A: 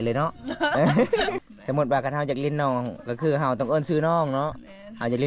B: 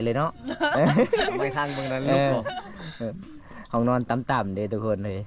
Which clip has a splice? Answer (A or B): A